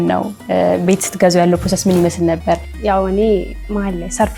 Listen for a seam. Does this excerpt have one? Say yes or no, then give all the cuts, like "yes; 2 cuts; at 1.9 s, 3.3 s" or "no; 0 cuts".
yes; 1 cut; at 2.7 s